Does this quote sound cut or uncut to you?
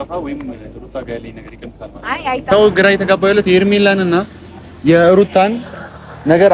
cut